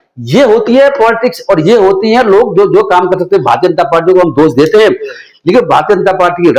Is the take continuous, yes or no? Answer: yes